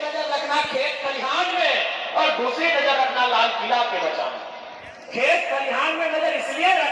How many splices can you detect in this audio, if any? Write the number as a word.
zero